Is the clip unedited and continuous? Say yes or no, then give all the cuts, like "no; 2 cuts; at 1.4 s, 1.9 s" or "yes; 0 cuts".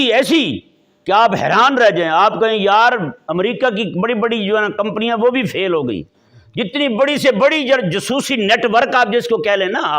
yes; 0 cuts